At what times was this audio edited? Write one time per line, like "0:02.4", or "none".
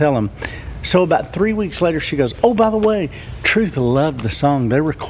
none